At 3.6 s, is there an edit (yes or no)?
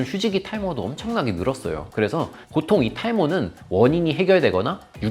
no